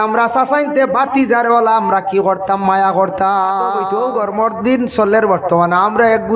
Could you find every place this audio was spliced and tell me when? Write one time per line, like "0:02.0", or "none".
0:03.8